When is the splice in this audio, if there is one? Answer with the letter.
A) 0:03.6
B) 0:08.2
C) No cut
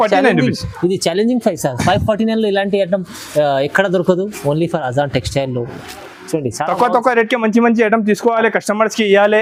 C